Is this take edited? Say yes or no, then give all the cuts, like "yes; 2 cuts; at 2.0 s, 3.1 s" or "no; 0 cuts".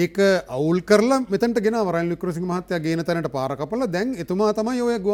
no; 0 cuts